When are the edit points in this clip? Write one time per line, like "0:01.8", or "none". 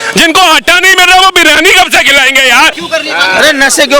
0:02.8

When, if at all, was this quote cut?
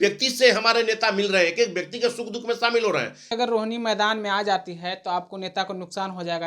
0:03.3

